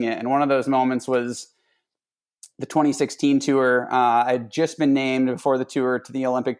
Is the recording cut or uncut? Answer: uncut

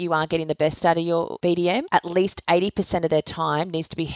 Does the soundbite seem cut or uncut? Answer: cut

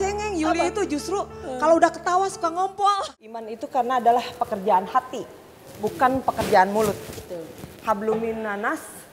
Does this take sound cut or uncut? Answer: cut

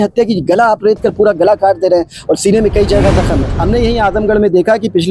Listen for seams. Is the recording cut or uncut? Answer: cut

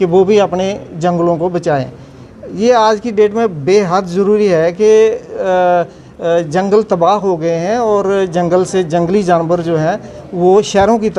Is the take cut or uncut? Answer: uncut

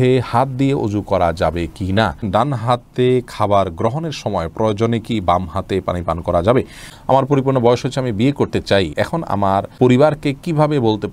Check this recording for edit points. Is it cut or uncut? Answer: cut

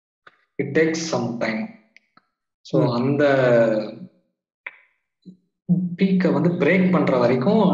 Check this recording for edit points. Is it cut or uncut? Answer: uncut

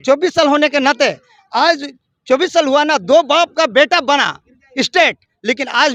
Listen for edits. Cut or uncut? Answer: uncut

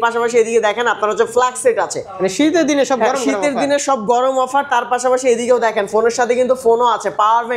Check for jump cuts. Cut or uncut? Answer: uncut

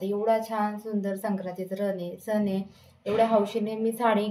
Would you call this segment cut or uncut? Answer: uncut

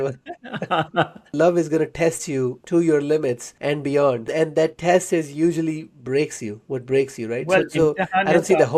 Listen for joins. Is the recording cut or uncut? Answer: cut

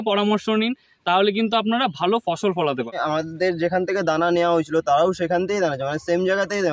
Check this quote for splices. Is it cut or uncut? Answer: cut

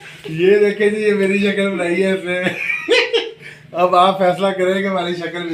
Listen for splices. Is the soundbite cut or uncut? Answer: uncut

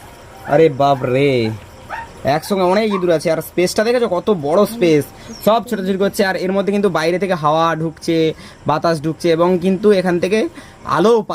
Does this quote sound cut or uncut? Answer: uncut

